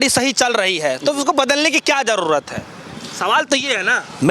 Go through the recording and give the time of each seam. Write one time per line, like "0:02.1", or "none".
none